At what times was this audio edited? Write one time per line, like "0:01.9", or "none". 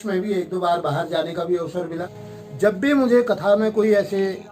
0:02.0